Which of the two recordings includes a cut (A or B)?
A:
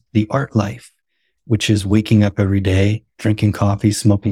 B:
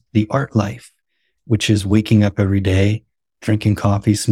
A